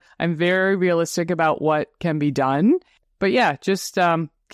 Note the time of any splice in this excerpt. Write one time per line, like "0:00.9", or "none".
0:03.0